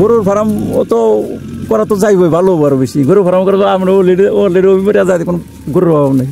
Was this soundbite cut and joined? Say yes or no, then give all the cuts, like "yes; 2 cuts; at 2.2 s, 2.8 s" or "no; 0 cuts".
no; 0 cuts